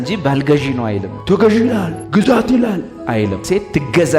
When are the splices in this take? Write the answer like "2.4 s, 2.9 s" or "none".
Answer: 1.1 s